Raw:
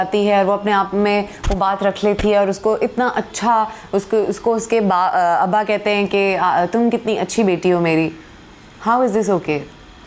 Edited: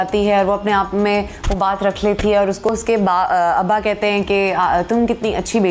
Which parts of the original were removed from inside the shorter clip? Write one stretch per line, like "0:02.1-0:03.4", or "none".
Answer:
0:02.7-0:04.5